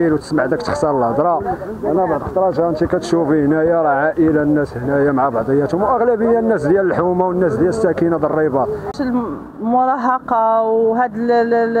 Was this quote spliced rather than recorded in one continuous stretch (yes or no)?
no